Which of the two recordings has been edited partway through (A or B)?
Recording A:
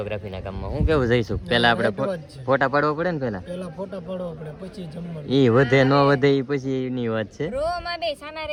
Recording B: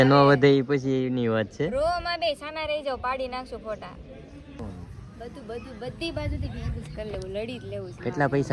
B